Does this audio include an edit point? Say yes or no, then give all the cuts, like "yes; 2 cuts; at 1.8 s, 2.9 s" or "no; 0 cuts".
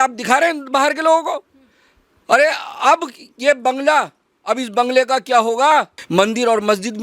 yes; 1 cut; at 6.0 s